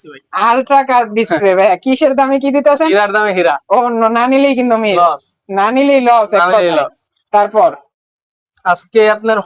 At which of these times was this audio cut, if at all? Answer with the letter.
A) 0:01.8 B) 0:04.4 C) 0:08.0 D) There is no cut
D